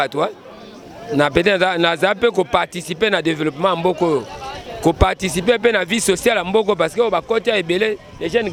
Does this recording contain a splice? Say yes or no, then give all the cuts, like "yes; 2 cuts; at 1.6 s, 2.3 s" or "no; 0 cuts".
no; 0 cuts